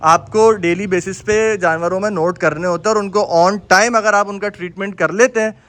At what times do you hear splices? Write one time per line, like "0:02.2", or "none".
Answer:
none